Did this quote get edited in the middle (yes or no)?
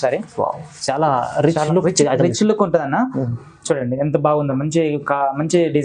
no